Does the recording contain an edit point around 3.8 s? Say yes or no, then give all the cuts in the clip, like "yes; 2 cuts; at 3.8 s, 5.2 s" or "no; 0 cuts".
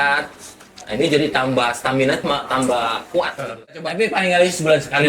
yes; 1 cut; at 3.8 s